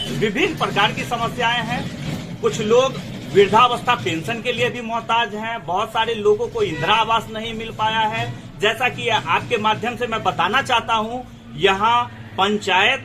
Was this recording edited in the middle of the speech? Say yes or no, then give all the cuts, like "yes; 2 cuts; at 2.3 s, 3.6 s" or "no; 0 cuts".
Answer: no; 0 cuts